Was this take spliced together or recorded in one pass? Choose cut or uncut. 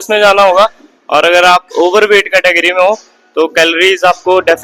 uncut